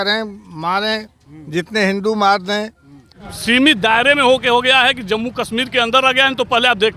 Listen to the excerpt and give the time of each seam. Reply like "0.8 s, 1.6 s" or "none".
3.2 s